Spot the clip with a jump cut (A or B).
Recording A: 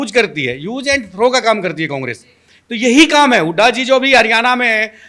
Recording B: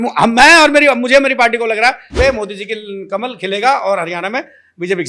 B